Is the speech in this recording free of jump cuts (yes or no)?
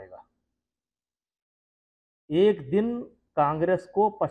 yes